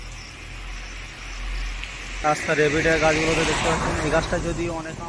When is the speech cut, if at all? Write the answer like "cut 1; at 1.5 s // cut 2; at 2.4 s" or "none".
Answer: none